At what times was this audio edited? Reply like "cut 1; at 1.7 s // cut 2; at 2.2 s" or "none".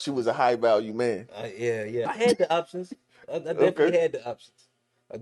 cut 1; at 2.1 s